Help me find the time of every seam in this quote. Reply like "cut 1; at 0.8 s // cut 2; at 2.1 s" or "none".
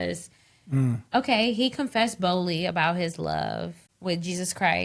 cut 1; at 3.8 s